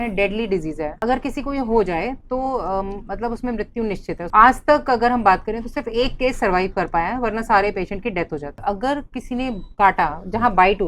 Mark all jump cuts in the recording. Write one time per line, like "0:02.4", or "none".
0:01.0
0:04.2
0:08.6